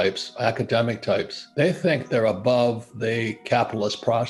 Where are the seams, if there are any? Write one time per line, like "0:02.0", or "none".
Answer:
none